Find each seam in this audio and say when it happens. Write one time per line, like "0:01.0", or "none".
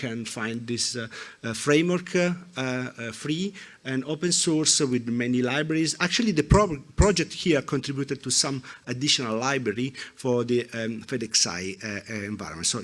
none